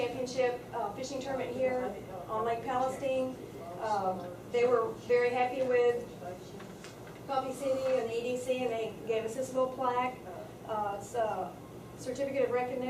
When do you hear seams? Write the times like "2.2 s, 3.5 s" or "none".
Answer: 3.7 s